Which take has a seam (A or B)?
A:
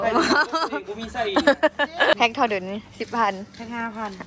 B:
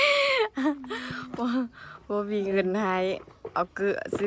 A